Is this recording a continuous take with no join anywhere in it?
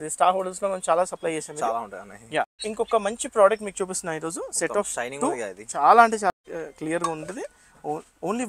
no; 2 cuts; at 2.6 s, 6.3 s

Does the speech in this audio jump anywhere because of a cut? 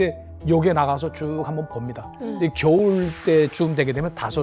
no; 0 cuts

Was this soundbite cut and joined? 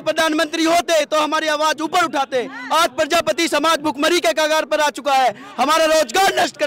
no; 0 cuts

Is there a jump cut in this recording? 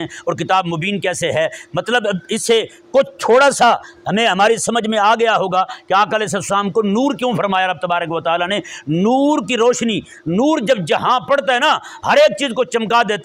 no; 0 cuts

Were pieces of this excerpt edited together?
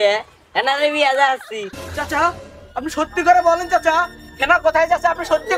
yes; 1 cut; at 1.8 s

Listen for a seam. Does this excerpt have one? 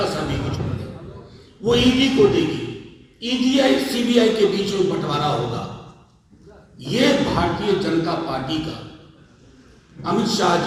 no; 0 cuts

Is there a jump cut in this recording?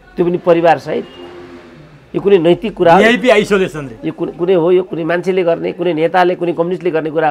no; 0 cuts

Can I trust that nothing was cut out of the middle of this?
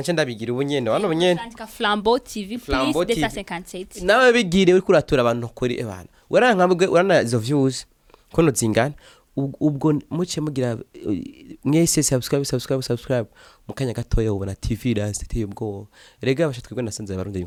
yes; 0 cuts

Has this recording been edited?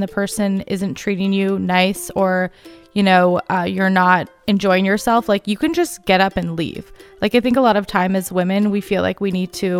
no; 0 cuts

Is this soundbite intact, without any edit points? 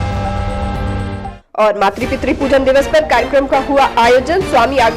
yes; 0 cuts

